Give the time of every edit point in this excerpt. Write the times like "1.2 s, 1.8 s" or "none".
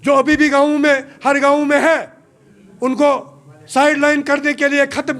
none